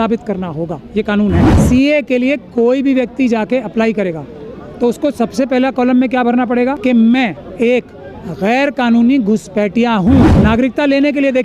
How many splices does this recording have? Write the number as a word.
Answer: four